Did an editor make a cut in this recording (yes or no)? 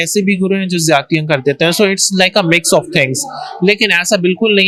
no